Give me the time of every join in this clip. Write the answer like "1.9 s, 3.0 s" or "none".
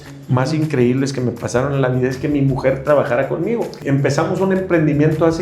3.8 s